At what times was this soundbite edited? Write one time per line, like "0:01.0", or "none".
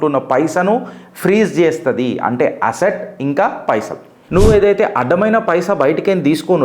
0:04.2